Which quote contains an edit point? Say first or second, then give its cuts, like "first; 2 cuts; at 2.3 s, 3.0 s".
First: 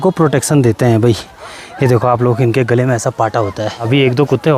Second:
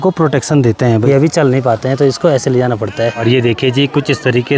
second; 2 cuts; at 1.0 s, 3.2 s